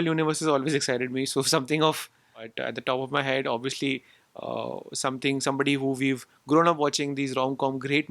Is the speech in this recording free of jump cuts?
no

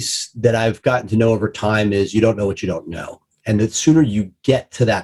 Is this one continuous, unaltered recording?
yes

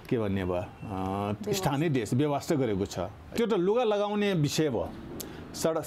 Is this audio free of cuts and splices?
no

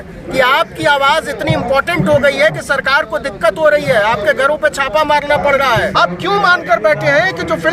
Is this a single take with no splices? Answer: no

